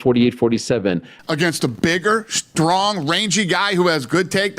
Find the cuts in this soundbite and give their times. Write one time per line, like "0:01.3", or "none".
0:01.1